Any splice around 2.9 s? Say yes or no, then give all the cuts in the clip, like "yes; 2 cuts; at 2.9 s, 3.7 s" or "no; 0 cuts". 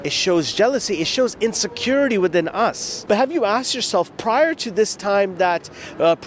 yes; 1 cut; at 2.9 s